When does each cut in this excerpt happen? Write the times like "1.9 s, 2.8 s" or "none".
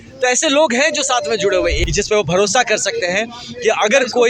1.8 s

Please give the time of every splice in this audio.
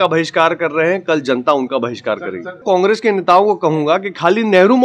2.6 s

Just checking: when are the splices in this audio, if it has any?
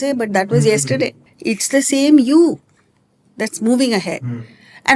1.3 s

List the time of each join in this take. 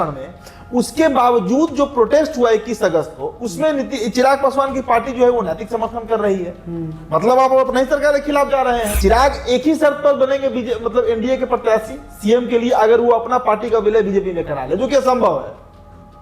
8.9 s

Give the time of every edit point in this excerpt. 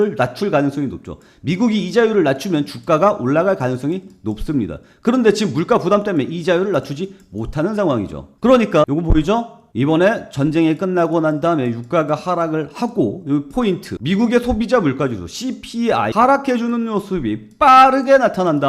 none

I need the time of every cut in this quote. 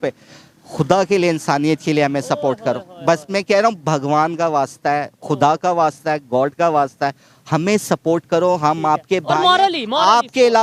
none

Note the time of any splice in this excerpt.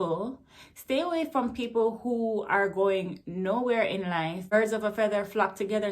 4.5 s

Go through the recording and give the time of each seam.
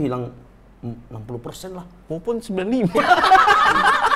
1.9 s

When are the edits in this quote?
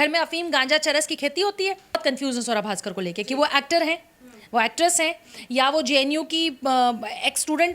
2.0 s

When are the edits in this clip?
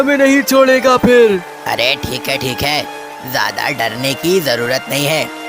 1.5 s

